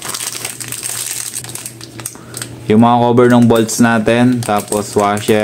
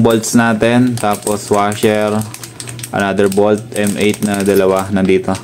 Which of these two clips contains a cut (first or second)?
first